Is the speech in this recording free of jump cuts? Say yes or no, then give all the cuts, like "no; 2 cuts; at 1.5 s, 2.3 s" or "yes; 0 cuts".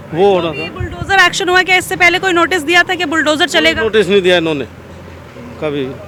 yes; 0 cuts